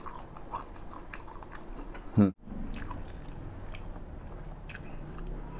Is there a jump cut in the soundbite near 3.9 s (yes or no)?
no